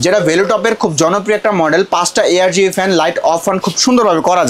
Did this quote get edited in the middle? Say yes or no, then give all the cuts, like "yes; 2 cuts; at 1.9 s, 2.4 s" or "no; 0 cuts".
no; 0 cuts